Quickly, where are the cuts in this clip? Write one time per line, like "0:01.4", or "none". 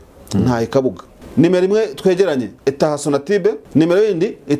0:01.1
0:02.5
0:03.6